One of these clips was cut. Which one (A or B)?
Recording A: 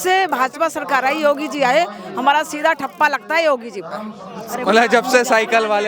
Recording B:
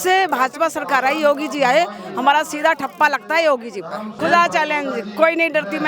B